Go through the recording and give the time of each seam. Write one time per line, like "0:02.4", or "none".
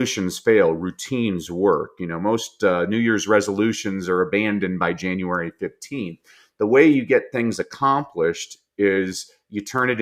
none